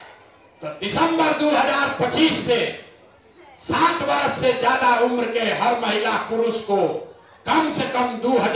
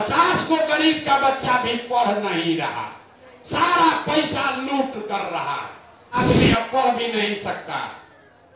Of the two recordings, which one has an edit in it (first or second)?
second